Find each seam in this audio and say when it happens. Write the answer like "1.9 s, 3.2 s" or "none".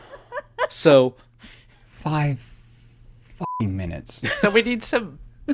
none